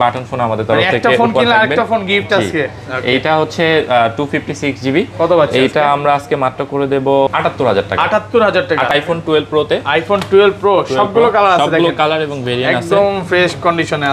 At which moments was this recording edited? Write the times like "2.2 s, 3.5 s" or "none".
7.3 s, 8.9 s